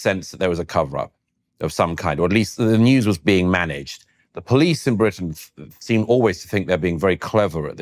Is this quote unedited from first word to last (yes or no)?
yes